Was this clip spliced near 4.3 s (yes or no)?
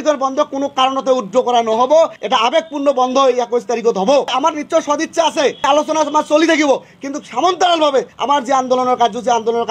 yes